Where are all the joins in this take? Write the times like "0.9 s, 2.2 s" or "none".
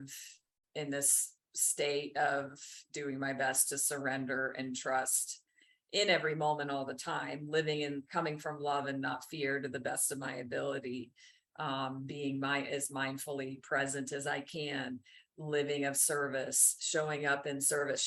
none